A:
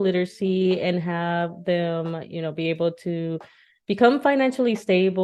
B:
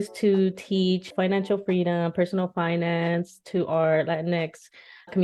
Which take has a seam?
B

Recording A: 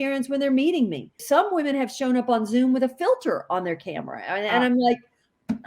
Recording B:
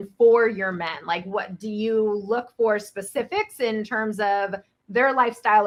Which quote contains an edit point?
A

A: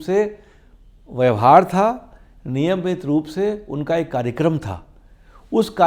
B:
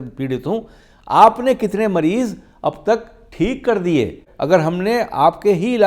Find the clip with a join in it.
B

